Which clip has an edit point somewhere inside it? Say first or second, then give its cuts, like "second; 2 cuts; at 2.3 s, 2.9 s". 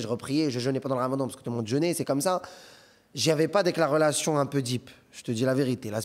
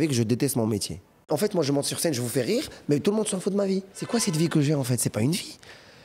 second; 2 cuts; at 1.2 s, 4.0 s